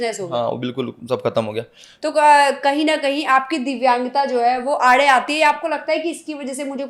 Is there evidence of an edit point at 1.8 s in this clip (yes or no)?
yes